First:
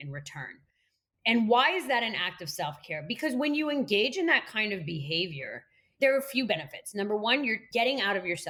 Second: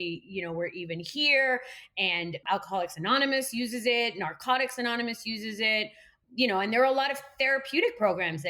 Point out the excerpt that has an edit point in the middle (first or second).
second